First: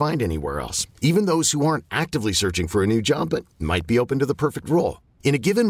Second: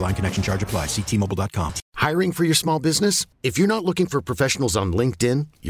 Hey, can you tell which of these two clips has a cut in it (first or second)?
second